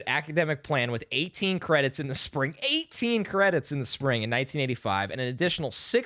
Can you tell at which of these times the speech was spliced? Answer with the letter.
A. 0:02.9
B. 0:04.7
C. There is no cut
C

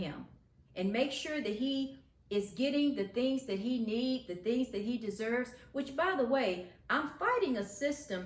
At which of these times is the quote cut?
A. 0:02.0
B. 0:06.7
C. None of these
C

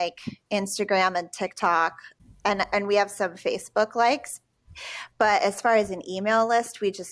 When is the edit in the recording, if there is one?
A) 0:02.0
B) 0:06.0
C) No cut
A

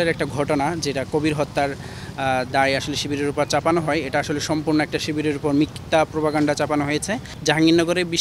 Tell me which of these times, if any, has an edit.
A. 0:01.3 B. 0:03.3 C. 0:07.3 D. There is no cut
C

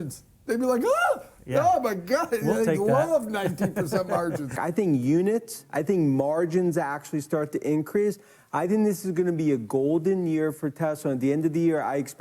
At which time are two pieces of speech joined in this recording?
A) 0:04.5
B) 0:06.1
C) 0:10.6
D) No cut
A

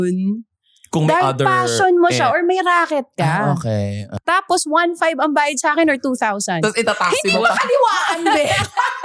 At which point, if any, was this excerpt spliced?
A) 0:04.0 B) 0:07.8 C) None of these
A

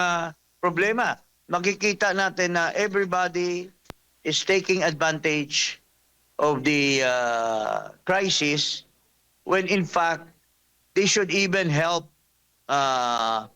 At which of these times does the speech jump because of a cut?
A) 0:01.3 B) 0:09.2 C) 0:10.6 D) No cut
A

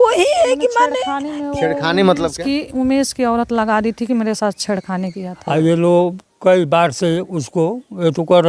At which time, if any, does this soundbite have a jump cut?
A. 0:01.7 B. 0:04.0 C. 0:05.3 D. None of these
C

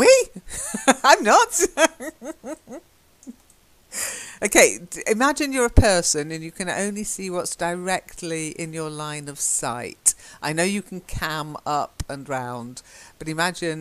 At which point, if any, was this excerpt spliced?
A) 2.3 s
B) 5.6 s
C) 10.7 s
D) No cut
C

